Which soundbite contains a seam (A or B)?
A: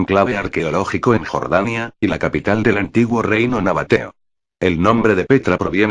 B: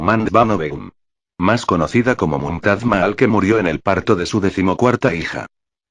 B